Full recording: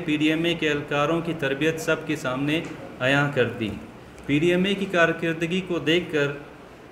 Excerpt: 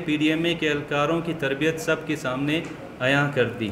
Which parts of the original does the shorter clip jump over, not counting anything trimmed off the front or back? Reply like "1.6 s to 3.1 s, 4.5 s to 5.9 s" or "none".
none